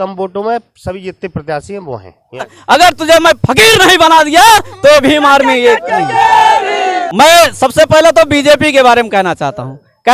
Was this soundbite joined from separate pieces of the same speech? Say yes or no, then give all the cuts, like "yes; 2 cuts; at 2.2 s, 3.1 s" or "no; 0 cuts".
yes; 2 cuts; at 2.6 s, 6.8 s